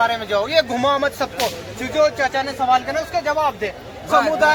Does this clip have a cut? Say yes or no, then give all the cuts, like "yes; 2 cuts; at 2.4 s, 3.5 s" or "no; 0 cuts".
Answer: no; 0 cuts